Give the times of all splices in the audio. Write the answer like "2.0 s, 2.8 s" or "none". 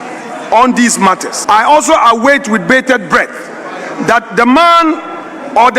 1.3 s